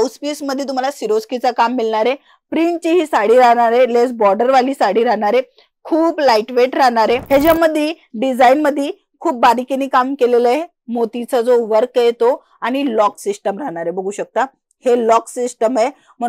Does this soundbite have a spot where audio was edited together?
yes; 1 cut; at 7.2 s

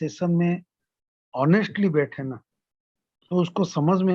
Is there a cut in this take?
no; 0 cuts

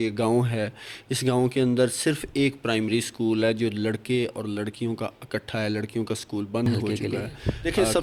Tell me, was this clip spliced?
yes; 1 cut; at 6.7 s

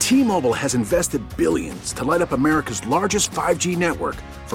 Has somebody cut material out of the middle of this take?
no; 0 cuts

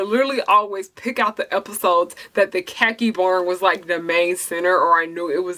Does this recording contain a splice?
no; 0 cuts

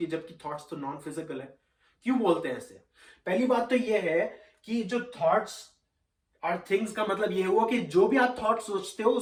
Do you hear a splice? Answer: no; 0 cuts

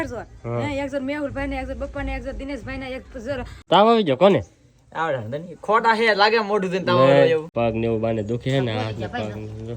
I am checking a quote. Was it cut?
yes; 2 cuts; at 3.5 s, 7.5 s

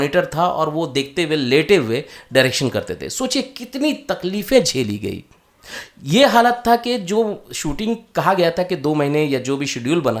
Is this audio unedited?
yes; 0 cuts

